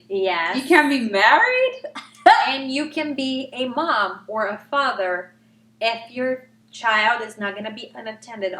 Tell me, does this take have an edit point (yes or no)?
no